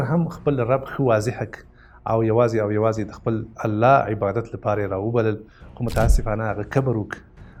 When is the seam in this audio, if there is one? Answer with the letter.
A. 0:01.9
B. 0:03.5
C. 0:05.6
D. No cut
D